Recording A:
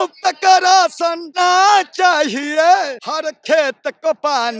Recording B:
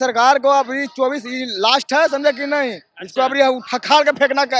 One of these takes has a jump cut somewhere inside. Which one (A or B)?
A